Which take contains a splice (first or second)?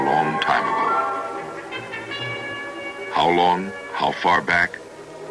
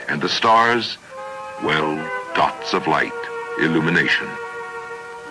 second